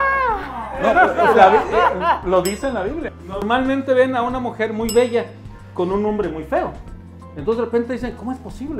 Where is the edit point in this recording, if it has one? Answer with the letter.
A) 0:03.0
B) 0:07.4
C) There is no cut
A